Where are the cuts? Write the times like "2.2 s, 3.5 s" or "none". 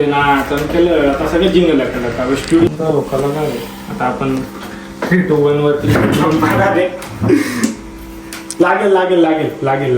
2.7 s

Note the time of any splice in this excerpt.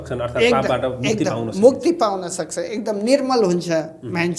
none

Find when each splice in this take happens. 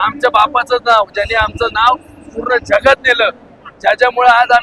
none

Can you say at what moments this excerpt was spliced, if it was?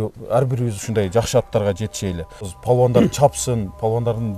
2.5 s

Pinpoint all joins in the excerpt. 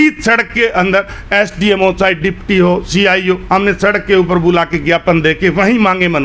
none

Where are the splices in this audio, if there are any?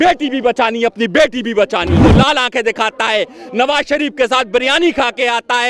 2.0 s

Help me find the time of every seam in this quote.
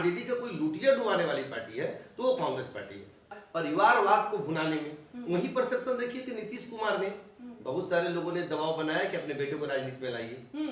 3.4 s

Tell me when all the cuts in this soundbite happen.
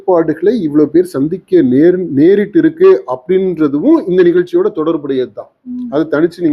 none

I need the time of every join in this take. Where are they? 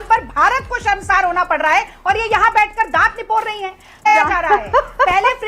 2.0 s, 4.1 s

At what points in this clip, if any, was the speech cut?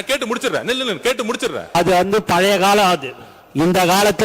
1.7 s

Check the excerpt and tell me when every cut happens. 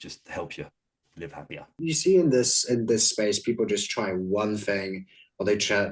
1.9 s

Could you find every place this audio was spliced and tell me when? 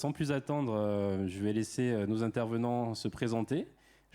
none

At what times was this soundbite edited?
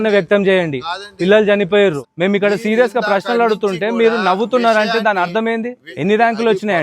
2.0 s, 5.8 s

